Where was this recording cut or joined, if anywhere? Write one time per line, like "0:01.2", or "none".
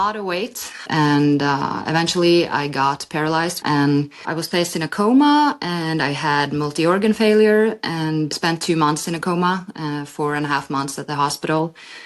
0:03.6

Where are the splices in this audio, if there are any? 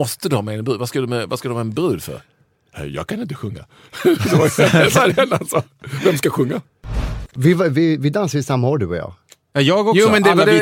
0:06.7

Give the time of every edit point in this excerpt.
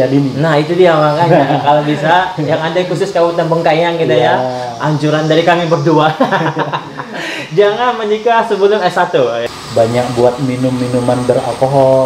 0:09.4

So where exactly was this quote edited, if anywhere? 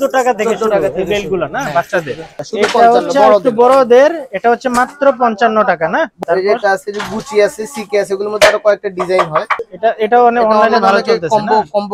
0:02.3
0:06.2
0:09.6

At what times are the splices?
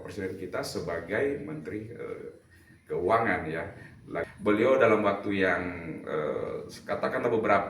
0:04.2

